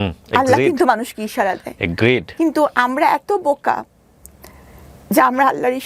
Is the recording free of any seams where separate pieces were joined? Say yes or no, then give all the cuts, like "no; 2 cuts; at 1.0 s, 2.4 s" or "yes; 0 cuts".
yes; 0 cuts